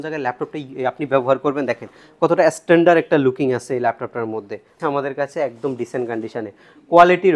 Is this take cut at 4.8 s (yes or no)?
yes